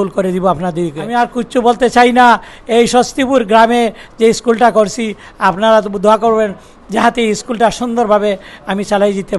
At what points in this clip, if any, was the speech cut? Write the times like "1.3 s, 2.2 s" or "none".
1.0 s